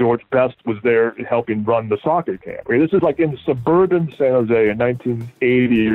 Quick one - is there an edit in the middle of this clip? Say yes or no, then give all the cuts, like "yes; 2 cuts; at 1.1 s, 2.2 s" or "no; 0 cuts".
no; 0 cuts